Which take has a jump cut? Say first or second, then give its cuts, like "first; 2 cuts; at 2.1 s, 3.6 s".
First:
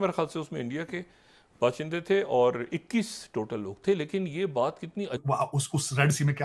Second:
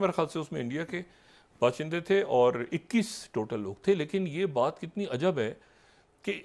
first; 1 cut; at 5.2 s